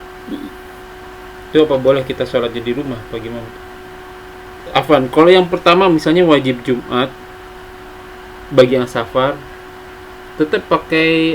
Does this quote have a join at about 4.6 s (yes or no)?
yes